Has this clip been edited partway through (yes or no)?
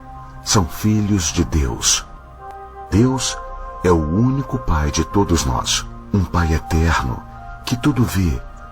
yes